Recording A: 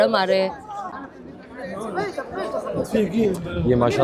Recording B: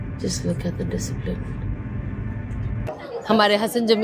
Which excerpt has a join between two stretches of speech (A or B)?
B